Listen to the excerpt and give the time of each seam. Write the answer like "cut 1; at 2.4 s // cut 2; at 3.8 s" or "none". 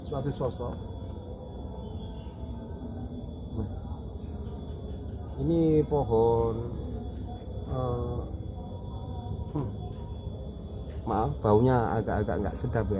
none